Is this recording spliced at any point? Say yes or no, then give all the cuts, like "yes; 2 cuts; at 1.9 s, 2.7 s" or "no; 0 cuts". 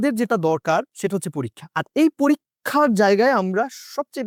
no; 0 cuts